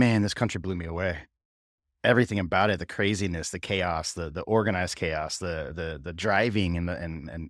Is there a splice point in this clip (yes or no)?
no